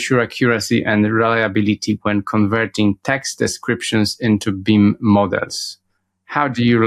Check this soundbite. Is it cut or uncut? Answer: uncut